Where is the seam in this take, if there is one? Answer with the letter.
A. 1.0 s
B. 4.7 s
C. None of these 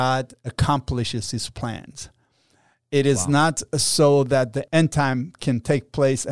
B